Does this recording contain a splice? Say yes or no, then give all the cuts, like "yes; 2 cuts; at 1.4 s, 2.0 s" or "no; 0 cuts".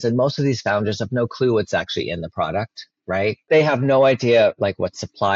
yes; 1 cut; at 3.5 s